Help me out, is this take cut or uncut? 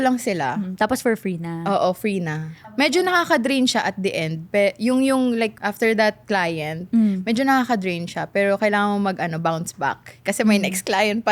cut